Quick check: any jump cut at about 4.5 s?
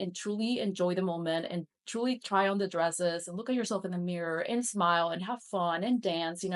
no; 0 cuts

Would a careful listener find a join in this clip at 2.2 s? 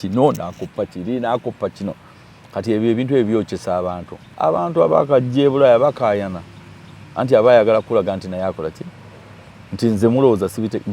no; 1 cut; at 4.2 s

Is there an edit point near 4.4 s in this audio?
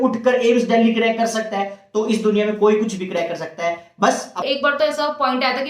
yes; 1 cut; at 4.4 s

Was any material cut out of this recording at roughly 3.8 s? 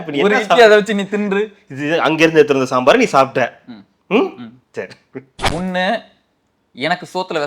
no; 1 cut; at 5.4 s

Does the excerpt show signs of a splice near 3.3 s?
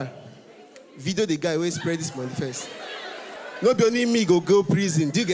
yes; 1 cut; at 3.3 s

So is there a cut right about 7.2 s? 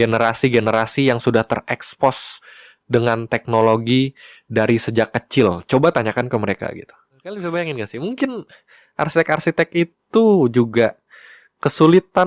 yes; 1 cut; at 7.2 s

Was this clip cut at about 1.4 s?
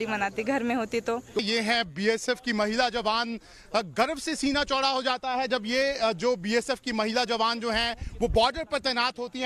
yes; 1 cut; at 1.4 s

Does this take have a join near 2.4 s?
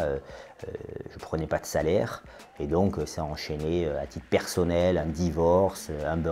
yes; 1 cut; at 2.4 s

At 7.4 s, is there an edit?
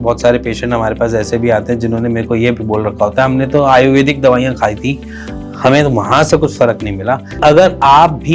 yes; 1 cut; at 7.4 s

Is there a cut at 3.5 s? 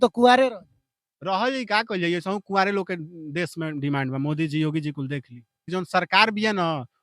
no; 1 cut; at 5.7 s

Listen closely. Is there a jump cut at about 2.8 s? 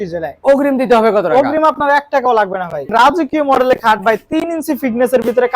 yes; 1 cut; at 2.8 s

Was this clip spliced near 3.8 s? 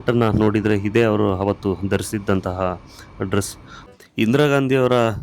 yes; 1 cut; at 3.8 s

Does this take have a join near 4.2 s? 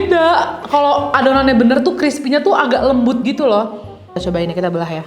yes; 1 cut; at 4.2 s

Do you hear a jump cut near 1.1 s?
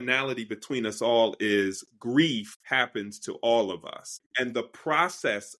no; 2 cuts; at 2.6 s, 4.2 s

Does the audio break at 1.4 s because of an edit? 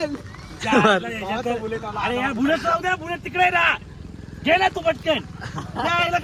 no; 0 cuts

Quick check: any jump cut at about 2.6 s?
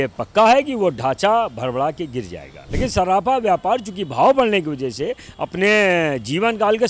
yes; 1 cut; at 2.6 s

